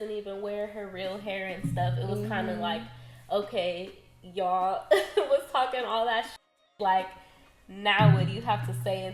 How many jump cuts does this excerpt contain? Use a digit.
0